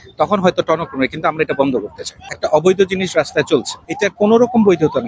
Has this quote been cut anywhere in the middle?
yes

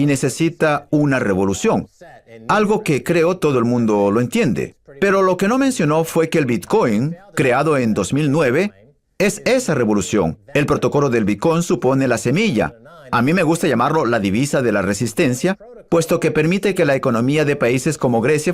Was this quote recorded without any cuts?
no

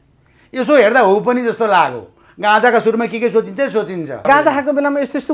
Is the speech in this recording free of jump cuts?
no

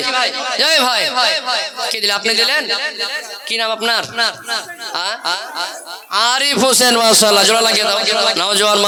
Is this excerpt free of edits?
yes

